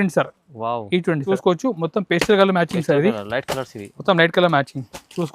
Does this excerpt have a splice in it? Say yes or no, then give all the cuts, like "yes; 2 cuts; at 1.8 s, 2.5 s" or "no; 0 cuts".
yes; 1 cut; at 1.2 s